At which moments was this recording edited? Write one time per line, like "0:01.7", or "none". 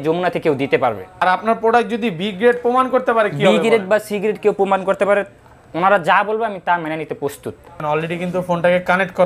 0:01.2
0:07.8